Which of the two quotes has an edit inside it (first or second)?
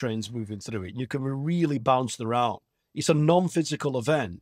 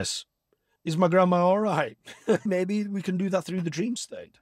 second